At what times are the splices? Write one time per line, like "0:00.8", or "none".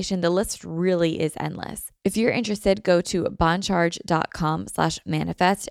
0:01.8